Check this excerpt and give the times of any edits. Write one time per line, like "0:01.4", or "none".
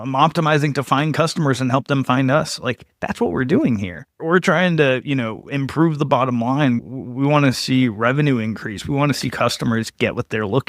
none

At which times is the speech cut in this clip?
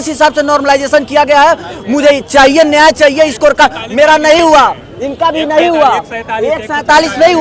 none

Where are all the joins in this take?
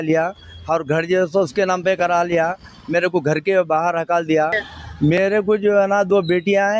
0:04.7

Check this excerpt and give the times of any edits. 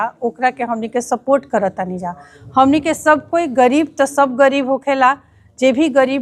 none

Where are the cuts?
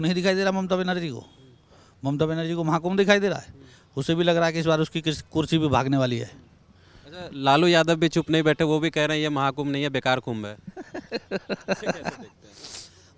none

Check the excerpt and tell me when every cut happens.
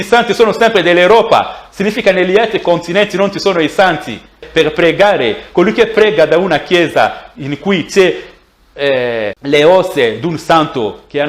0:04.4
0:09.4

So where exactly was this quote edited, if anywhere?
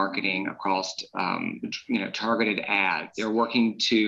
0:03.1

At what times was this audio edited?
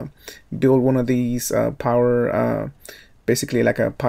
0:03.1

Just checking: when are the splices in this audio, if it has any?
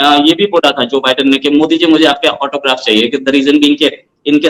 none

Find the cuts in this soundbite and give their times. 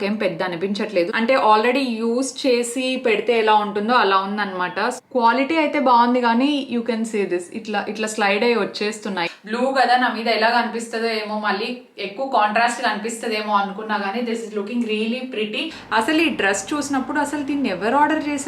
0:01.1
0:05.0
0:09.2
0:15.8

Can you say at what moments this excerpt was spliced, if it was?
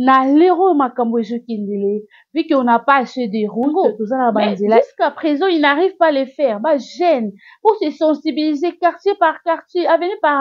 0:04.8

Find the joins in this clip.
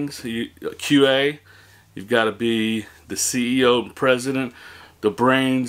none

